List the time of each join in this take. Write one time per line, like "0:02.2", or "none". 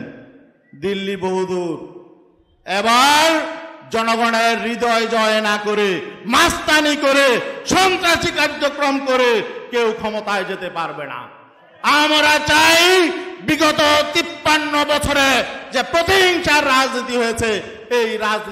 none